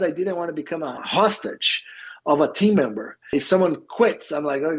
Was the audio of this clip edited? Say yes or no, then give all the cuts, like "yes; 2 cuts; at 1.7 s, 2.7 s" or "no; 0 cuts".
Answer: yes; 2 cuts; at 1.0 s, 3.3 s